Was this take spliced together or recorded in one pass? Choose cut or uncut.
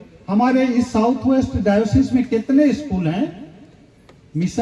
uncut